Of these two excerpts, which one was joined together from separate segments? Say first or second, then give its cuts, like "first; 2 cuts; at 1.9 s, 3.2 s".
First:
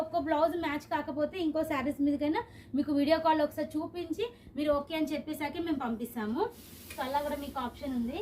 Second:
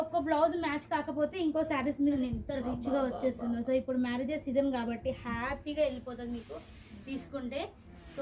second; 1 cut; at 2.2 s